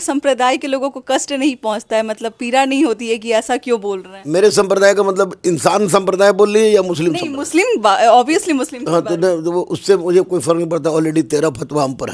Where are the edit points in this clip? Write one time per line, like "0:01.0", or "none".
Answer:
none